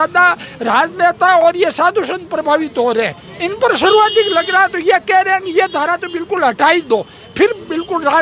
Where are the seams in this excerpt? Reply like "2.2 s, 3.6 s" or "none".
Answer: none